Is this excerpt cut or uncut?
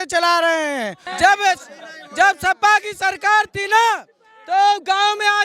cut